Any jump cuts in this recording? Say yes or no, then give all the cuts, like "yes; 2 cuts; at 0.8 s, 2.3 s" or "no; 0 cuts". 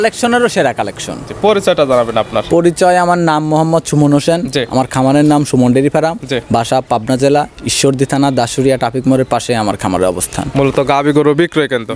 no; 0 cuts